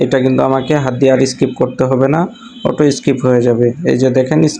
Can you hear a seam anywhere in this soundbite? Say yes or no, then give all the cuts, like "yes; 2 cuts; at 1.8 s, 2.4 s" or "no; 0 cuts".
no; 0 cuts